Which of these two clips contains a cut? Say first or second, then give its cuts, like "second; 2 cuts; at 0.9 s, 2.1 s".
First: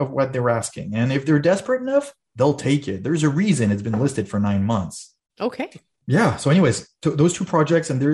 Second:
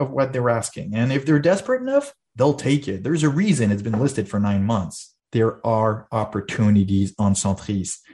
second; 1 cut; at 5.2 s